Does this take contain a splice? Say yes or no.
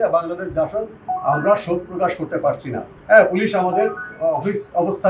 no